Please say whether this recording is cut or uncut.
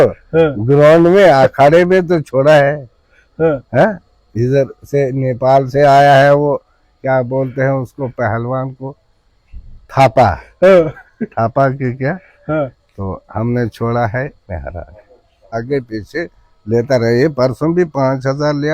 cut